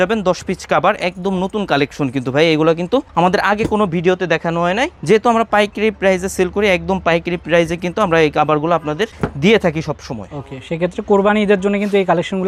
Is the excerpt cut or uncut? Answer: uncut